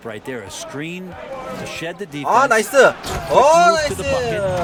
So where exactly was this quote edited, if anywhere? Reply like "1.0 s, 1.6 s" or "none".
none